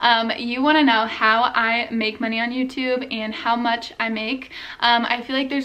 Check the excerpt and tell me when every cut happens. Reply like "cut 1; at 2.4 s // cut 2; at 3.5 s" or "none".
none